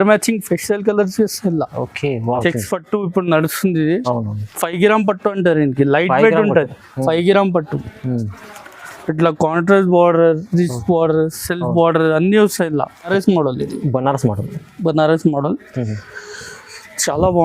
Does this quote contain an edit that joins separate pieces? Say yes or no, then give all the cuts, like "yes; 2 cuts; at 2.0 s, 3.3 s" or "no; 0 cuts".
yes; 2 cuts; at 2.4 s, 13.1 s